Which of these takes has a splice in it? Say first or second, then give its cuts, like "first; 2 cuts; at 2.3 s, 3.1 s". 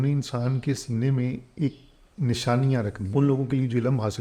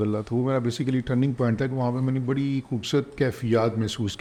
first; 1 cut; at 3.0 s